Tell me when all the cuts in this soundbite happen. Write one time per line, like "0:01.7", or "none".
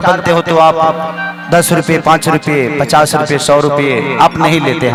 none